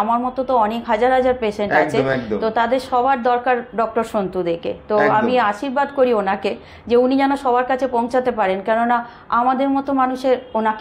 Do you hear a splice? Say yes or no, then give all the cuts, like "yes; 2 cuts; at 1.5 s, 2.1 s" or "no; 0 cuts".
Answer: no; 0 cuts